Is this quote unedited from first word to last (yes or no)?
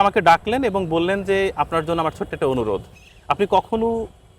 yes